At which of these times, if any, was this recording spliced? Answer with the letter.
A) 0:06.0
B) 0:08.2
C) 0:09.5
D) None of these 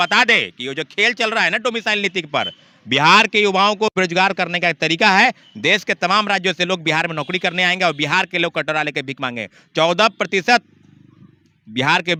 D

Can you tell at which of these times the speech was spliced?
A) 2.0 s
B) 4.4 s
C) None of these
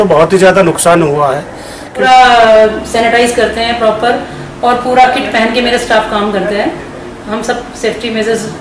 A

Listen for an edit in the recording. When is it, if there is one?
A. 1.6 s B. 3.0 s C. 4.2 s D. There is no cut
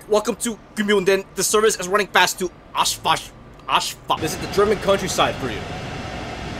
C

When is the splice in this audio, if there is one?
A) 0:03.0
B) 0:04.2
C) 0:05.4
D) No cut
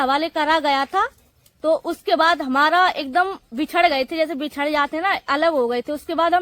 D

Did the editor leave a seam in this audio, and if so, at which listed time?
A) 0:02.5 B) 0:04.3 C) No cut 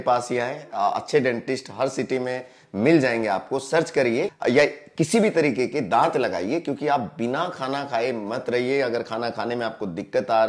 B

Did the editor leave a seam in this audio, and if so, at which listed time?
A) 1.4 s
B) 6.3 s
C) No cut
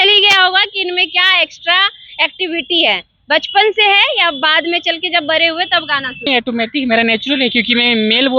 B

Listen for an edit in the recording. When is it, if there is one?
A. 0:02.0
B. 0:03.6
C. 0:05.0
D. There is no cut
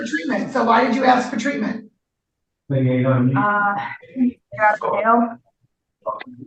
D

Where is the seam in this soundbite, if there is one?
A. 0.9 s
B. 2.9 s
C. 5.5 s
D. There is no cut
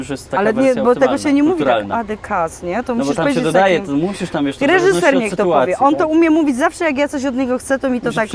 D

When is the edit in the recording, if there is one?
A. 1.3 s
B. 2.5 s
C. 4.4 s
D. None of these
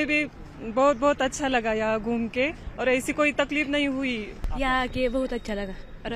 C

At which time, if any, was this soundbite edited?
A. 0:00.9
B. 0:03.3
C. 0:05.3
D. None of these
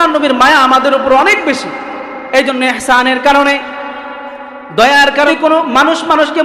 C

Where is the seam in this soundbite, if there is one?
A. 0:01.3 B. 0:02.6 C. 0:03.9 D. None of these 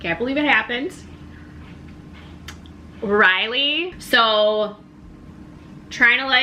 C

